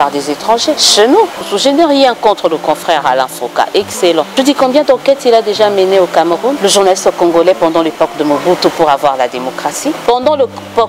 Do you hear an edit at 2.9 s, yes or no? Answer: no